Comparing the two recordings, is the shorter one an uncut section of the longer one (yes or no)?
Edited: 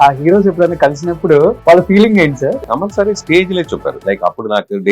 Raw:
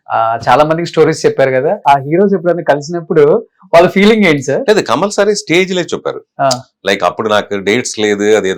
no